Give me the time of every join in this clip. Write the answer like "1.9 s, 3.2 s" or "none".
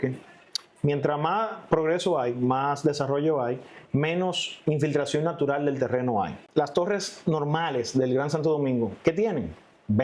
6.4 s